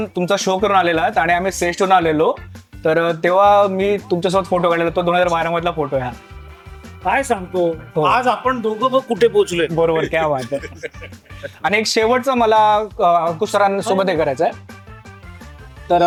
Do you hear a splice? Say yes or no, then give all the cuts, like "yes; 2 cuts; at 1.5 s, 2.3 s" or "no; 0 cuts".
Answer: no; 0 cuts